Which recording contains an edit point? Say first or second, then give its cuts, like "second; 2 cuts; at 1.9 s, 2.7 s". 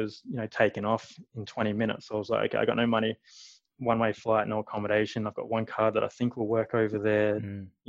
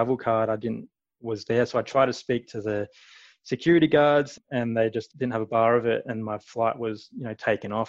second; 1 cut; at 4.6 s